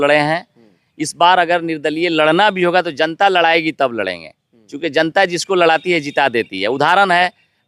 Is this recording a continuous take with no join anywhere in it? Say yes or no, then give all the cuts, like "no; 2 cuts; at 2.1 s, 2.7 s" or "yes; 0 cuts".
yes; 0 cuts